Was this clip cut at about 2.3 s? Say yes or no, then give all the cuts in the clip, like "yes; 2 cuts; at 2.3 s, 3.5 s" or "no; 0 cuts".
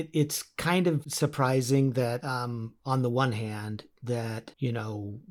no; 1 cut; at 1.1 s